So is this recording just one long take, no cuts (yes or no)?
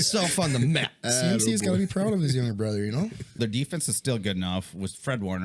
no